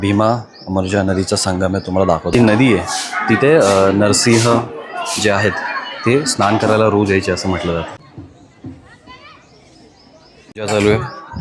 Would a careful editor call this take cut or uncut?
uncut